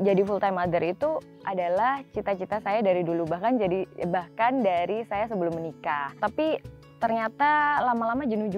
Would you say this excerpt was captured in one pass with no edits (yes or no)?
no